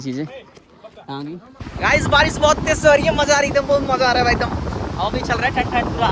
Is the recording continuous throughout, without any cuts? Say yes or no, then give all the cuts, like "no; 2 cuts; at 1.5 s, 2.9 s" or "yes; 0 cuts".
no; 1 cut; at 1.6 s